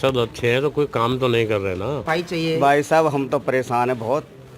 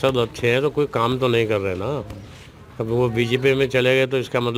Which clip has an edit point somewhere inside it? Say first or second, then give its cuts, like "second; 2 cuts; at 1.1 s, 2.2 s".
first; 1 cut; at 2.0 s